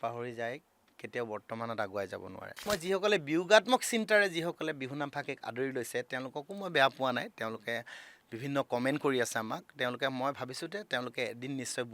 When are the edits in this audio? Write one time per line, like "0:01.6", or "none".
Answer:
0:02.6